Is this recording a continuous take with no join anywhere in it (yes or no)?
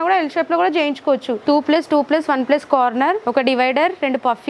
no